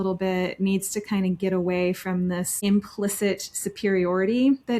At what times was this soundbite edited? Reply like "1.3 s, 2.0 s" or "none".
2.5 s